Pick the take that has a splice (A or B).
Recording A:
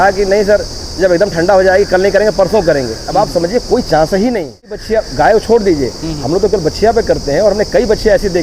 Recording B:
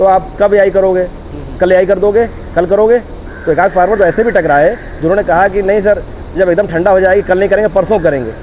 A